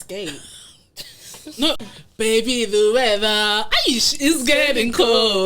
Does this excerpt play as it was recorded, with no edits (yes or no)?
no